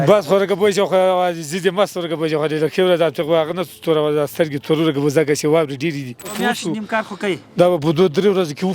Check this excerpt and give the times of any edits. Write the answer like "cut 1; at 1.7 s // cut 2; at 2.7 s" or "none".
cut 1; at 6.3 s